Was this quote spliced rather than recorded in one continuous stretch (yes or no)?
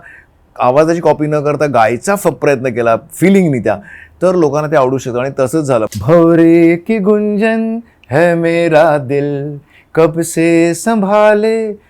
yes